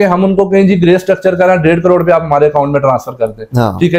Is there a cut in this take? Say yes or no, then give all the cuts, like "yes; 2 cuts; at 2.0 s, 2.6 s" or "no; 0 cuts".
no; 0 cuts